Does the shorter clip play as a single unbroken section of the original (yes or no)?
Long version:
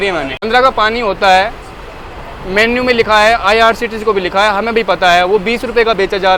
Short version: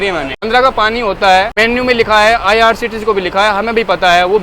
no